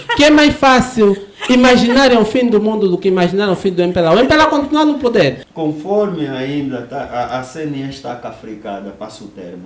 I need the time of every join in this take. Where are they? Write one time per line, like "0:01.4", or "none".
0:05.5